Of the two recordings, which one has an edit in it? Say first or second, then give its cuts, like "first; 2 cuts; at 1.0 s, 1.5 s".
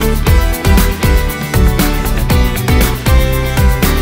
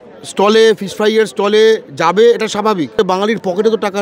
second; 1 cut; at 2.9 s